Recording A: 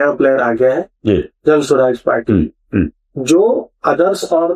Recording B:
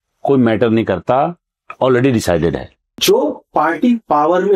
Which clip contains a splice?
B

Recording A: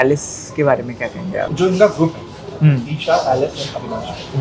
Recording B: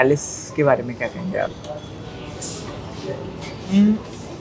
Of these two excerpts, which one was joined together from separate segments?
A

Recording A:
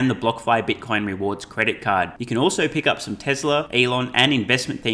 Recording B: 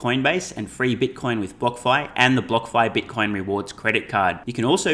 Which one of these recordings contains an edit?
A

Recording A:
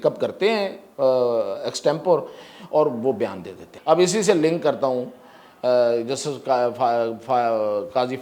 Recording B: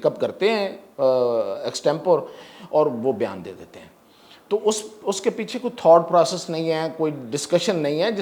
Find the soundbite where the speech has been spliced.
A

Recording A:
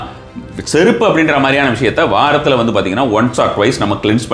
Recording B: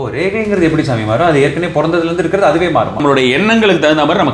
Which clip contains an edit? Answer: B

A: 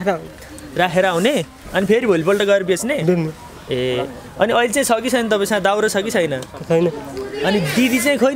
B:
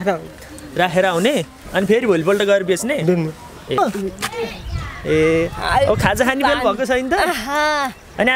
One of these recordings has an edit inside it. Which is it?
B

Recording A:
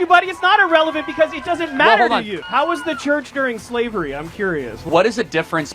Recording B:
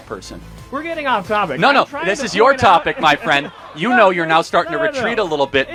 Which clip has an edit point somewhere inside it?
A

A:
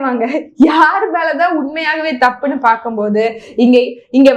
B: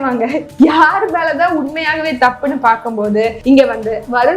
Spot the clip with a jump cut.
B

